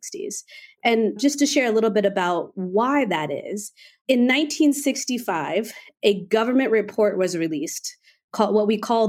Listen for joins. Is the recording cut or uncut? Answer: uncut